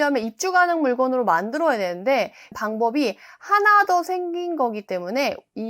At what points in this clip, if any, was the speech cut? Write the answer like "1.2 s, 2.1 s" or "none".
2.5 s